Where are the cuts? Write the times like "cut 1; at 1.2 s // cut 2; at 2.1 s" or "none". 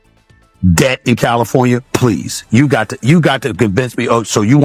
none